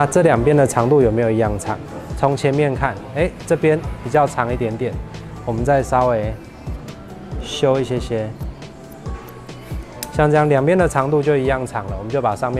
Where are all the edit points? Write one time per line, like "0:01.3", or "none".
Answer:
none